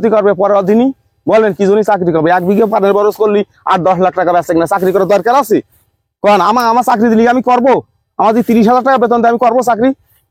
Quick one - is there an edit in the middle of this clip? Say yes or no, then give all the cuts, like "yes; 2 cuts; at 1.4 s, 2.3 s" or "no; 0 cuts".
no; 0 cuts